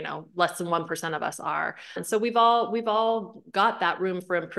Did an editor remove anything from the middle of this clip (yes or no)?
no